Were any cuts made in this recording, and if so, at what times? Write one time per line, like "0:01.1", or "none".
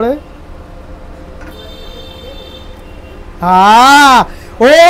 none